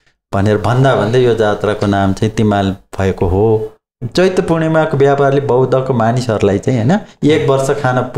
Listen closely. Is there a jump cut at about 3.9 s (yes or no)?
yes